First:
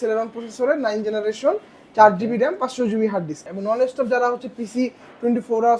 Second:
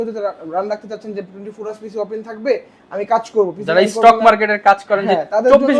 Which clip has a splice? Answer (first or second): first